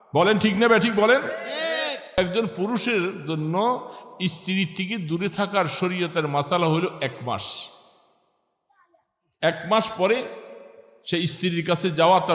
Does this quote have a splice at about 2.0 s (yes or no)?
yes